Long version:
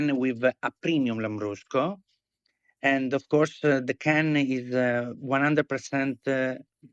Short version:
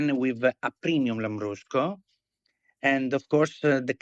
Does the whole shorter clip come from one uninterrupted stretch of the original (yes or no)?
yes